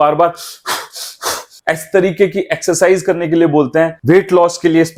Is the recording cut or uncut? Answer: uncut